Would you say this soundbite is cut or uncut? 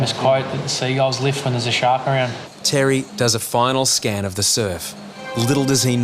cut